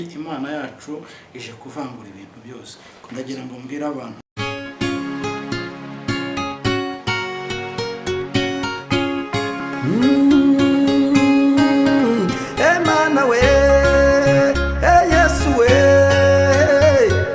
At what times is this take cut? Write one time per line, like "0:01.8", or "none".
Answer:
none